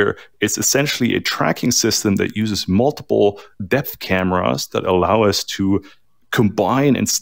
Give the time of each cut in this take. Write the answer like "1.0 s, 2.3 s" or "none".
none